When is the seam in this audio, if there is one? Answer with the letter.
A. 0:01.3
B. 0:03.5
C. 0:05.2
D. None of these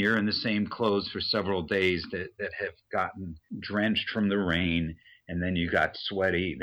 B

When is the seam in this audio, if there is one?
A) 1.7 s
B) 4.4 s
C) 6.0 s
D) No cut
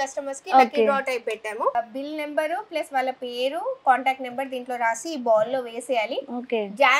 A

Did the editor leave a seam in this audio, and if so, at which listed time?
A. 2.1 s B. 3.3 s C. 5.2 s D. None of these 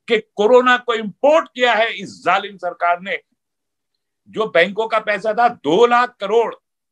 B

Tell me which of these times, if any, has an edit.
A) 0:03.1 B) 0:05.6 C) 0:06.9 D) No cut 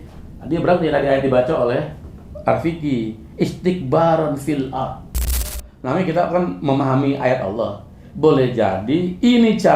B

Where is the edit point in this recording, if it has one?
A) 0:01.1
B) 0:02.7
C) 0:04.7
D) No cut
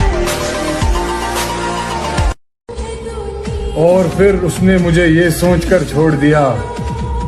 B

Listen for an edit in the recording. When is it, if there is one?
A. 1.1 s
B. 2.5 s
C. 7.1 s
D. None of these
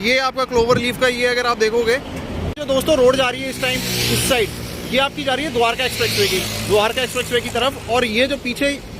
B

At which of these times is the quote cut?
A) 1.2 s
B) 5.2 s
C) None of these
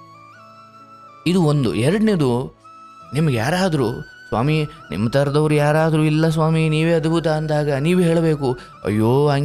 A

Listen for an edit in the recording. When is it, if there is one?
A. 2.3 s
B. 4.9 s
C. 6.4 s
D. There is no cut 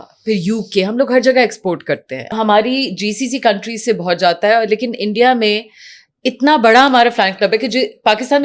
A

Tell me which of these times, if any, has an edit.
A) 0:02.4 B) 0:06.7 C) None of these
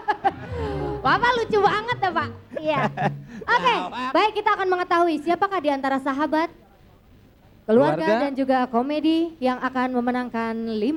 C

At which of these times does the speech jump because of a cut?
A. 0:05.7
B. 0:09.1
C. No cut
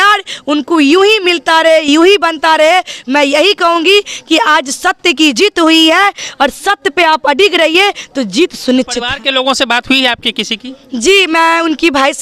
B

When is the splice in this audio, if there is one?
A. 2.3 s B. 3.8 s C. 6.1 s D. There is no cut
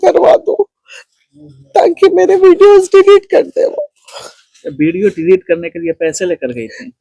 D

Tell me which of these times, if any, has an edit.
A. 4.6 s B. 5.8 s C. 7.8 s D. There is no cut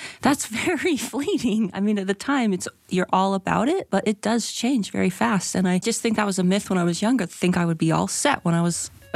B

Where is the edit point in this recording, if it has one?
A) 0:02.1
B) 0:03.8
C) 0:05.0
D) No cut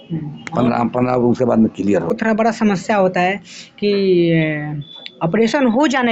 A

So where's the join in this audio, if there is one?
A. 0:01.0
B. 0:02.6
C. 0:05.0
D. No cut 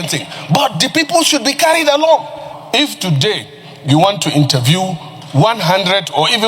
B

